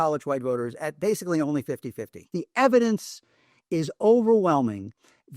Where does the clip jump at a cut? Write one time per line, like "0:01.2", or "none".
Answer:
0:02.3